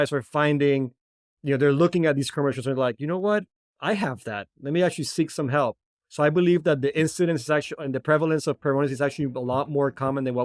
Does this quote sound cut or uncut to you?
uncut